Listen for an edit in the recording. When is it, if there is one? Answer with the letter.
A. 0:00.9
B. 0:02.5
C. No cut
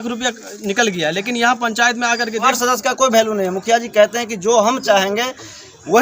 B